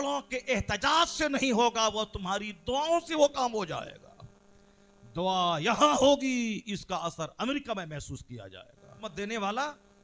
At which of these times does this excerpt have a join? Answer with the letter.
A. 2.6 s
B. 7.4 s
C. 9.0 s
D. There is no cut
C